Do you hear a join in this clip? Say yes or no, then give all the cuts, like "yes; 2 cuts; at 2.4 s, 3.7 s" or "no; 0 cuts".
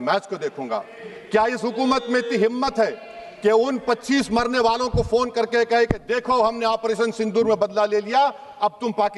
no; 0 cuts